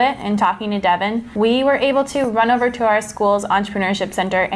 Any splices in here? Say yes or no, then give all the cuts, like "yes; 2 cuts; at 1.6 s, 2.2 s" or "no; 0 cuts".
yes; 1 cut; at 1.3 s